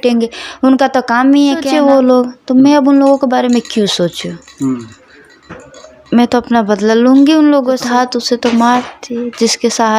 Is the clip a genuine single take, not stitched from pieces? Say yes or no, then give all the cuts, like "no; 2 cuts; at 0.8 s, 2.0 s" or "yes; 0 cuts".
no; 2 cuts; at 1.7 s, 7.8 s